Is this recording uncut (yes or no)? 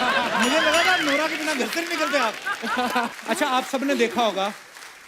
no